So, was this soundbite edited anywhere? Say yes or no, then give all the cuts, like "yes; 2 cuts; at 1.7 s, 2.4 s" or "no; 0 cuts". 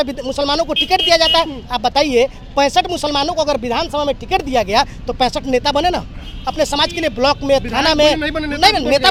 no; 0 cuts